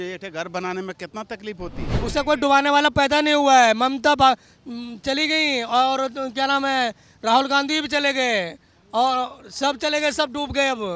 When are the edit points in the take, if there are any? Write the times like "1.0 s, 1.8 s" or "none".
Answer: 2.0 s